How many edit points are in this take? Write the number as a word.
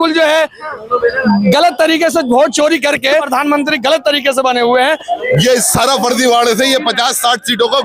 two